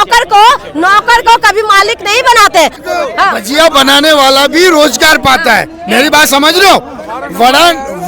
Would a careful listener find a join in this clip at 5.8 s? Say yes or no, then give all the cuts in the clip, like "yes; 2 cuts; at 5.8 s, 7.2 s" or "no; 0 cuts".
no; 1 cut; at 2.8 s